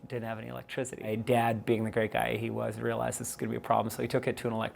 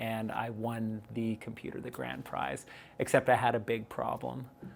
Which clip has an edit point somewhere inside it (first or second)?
first